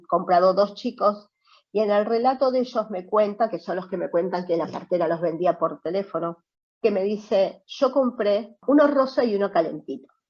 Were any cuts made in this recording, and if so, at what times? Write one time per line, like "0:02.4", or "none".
0:08.5